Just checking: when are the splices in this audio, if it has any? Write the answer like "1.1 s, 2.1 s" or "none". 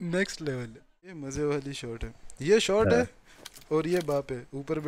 1.2 s